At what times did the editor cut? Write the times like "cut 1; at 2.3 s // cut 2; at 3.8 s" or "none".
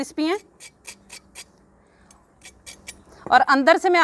none